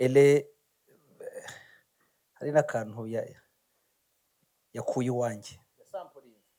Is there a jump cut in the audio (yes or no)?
no